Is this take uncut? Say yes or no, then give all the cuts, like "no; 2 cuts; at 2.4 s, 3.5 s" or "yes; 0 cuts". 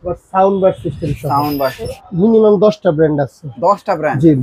no; 1 cut; at 1.9 s